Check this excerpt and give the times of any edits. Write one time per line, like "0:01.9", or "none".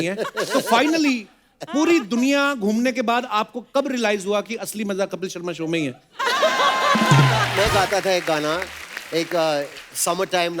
0:07.5